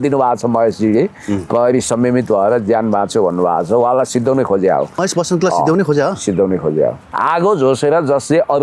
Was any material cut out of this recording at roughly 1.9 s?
no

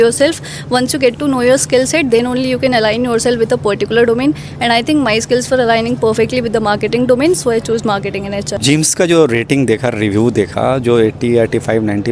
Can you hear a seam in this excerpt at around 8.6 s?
no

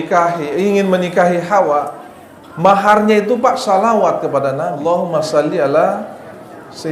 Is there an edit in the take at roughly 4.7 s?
yes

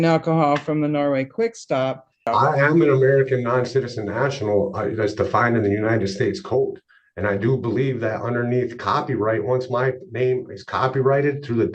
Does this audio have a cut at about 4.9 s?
no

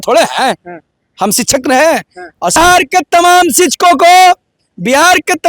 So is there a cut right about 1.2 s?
no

